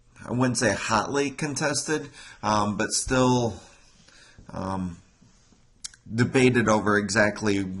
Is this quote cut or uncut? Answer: uncut